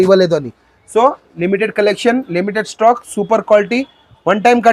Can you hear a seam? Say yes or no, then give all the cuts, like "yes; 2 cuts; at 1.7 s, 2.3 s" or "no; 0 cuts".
no; 0 cuts